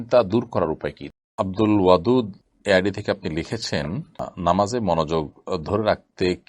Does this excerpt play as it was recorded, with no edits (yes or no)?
no